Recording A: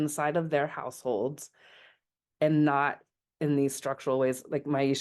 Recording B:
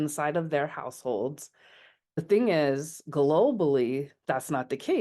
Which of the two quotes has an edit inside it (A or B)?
B